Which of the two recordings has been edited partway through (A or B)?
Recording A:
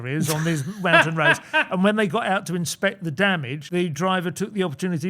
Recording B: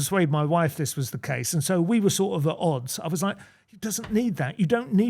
A